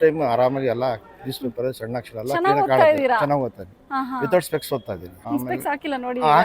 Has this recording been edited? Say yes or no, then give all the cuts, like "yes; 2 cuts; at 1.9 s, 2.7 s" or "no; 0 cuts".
yes; 1 cut; at 5.1 s